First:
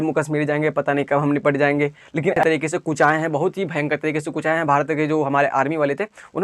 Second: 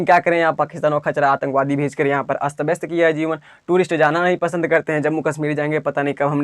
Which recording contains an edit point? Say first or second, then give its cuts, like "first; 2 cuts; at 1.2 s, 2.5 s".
first; 1 cut; at 2.4 s